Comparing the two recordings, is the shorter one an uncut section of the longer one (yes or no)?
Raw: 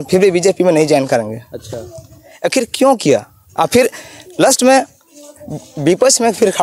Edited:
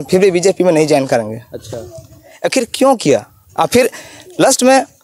yes